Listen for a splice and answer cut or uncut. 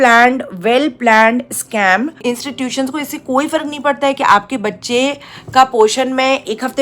cut